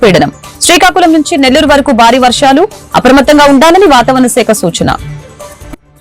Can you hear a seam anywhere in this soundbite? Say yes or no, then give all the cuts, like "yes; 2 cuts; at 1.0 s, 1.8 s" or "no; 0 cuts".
no; 0 cuts